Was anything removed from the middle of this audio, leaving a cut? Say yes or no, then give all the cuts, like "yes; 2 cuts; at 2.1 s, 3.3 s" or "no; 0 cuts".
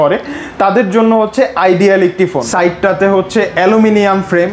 yes; 1 cut; at 2.4 s